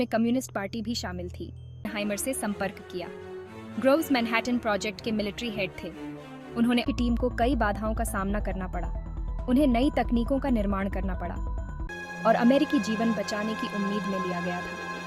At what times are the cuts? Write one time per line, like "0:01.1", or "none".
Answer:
0:01.9
0:06.8
0:11.9